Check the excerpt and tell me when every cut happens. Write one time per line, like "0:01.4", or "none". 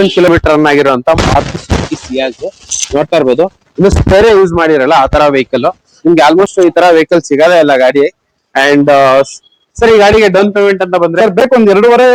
none